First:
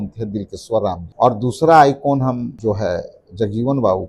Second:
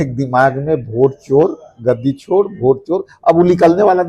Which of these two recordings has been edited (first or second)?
first